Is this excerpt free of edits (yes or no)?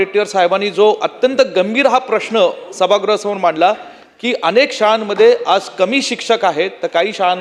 yes